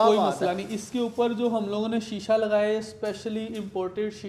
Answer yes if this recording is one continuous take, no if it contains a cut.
yes